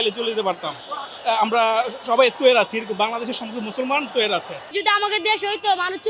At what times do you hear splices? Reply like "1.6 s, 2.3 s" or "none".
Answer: 4.6 s